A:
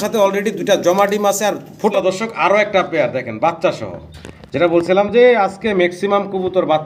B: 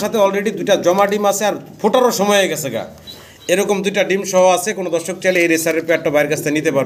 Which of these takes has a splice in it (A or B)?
A